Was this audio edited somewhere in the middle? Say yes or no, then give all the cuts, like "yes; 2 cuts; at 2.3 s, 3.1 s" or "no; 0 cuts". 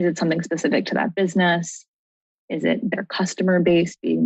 no; 0 cuts